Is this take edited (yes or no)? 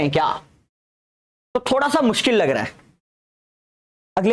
no